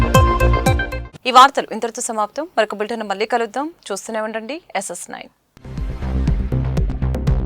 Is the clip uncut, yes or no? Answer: yes